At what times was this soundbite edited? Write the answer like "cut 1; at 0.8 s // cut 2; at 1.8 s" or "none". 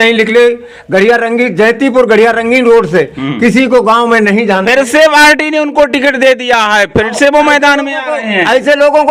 none